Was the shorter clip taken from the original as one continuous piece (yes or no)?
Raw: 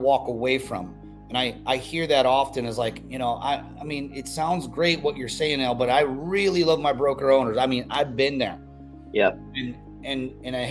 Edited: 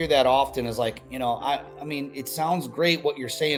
yes